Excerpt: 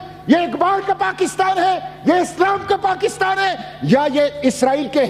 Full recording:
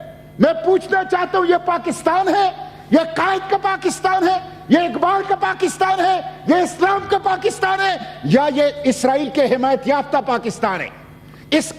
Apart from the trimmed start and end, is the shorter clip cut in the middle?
no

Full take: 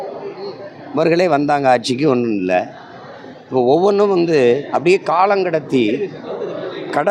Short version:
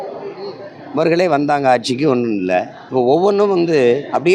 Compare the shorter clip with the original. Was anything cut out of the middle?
yes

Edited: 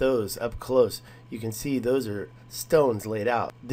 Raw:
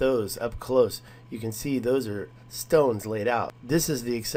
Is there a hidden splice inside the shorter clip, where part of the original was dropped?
no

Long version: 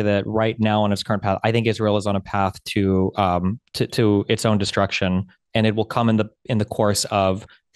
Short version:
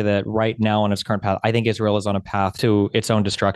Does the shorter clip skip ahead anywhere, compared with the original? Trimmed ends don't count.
yes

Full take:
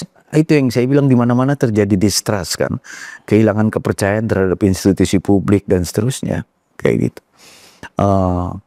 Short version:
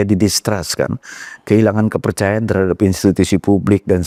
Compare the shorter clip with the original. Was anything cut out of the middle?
no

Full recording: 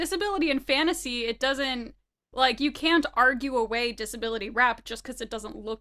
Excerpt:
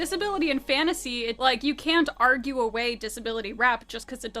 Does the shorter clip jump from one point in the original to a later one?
yes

